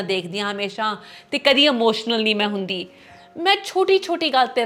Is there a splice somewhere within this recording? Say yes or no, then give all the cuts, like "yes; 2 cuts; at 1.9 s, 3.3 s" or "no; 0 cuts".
no; 0 cuts